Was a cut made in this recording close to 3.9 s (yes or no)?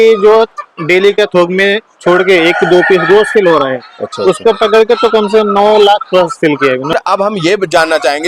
no